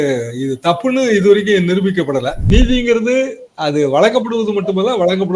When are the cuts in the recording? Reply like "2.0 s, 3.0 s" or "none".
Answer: 2.4 s